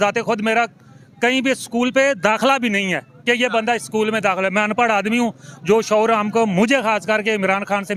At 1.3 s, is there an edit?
no; 0 cuts

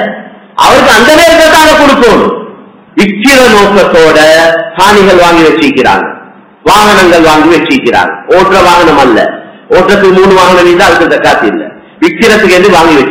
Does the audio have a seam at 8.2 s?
no; 1 cut; at 2.7 s

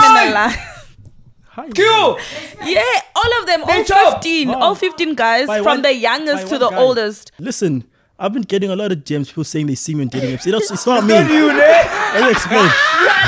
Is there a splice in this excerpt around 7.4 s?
yes; 1 cut; at 7.4 s

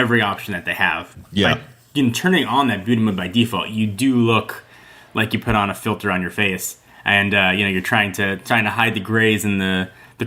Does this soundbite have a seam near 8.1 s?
no; 1 cut; at 1.1 s

